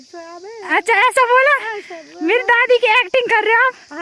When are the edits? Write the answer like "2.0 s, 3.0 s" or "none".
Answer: none